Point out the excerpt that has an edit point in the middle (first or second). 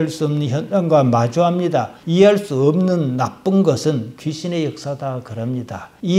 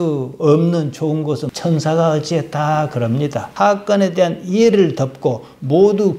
second